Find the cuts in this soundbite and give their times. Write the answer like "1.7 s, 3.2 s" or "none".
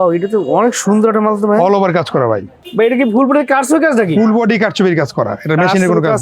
2.6 s